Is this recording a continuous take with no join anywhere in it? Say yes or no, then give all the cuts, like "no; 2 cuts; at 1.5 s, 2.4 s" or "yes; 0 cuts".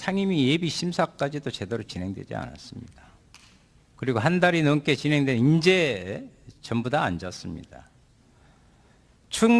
no; 1 cut; at 6.2 s